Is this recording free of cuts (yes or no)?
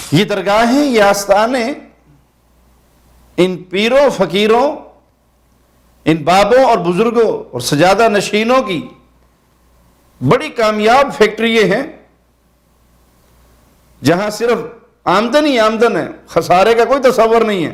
yes